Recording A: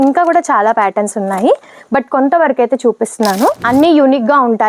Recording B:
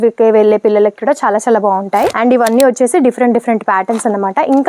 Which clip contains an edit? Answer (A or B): A